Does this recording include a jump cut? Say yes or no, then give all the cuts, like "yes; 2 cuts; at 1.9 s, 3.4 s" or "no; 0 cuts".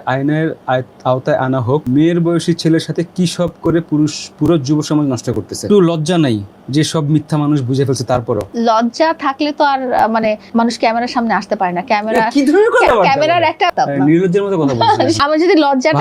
yes; 6 cuts; at 1.9 s, 5.6 s, 8.5 s, 10.4 s, 13.7 s, 15.2 s